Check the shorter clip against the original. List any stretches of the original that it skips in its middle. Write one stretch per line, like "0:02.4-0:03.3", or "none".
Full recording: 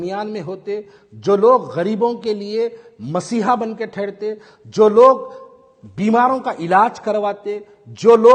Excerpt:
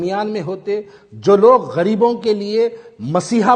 none